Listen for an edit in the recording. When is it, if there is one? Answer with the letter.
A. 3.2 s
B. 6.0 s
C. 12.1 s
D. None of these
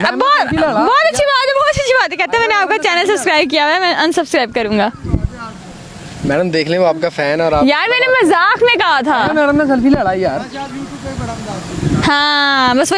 D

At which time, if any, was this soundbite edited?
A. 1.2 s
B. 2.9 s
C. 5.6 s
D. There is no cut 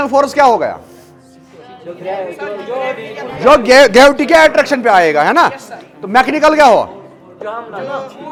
D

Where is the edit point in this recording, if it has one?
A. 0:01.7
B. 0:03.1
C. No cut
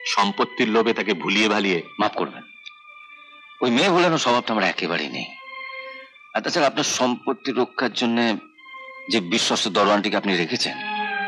C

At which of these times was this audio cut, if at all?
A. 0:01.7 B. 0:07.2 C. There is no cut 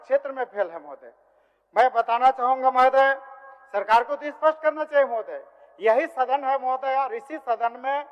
C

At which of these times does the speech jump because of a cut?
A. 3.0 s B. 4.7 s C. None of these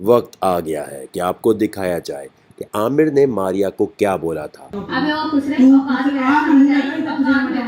B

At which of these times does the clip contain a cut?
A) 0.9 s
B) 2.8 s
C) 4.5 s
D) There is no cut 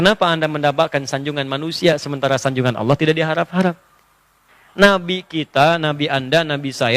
C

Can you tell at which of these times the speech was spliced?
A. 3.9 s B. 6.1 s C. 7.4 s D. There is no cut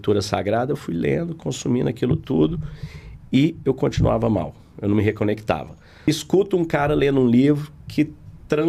B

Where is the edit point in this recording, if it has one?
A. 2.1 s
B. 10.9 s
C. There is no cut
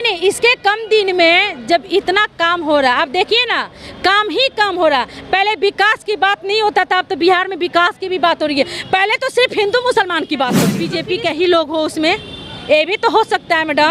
B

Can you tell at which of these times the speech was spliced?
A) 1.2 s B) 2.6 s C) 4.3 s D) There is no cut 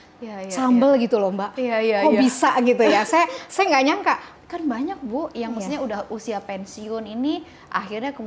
C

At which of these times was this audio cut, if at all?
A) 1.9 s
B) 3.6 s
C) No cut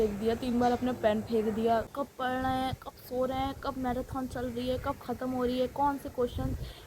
A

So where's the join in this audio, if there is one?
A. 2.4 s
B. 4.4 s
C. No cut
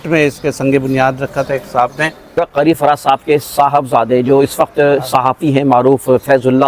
A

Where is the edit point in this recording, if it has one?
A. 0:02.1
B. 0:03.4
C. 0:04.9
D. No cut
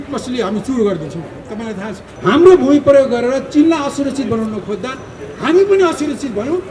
A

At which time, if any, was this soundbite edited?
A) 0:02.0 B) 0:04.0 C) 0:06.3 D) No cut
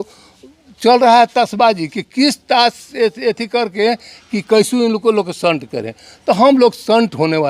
D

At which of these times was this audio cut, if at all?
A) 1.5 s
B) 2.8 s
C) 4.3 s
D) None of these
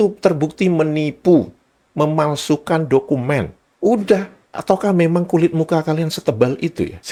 D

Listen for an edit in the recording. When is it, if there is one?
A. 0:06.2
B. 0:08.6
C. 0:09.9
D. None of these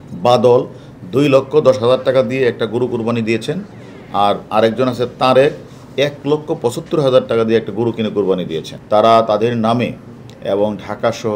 D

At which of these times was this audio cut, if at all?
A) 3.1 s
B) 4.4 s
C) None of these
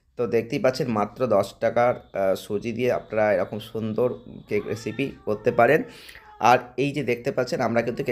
C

